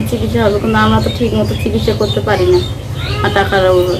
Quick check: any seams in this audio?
no; 0 cuts

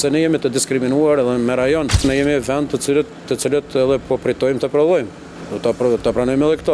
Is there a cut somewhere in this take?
yes; 1 cut; at 2.0 s

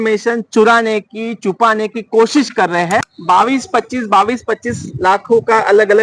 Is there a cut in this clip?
yes; 1 cut; at 3.1 s

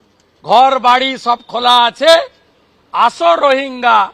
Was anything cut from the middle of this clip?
no; 0 cuts

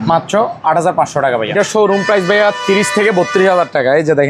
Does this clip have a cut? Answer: yes; 1 cut; at 1.5 s

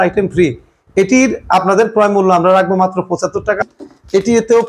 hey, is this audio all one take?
no; 1 cut; at 3.6 s

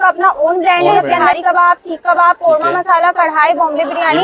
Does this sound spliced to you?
yes; 1 cut; at 1.0 s

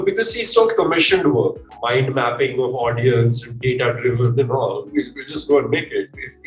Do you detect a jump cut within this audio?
yes; 1 cut; at 1.6 s

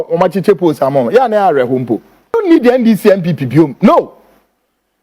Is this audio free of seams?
no; 1 cut; at 2.4 s

